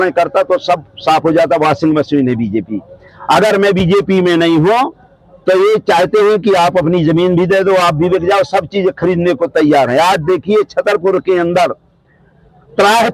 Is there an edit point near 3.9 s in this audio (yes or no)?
no